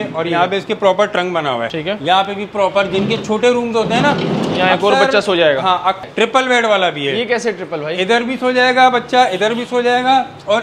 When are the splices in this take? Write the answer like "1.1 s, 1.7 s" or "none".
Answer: 1.7 s, 6.1 s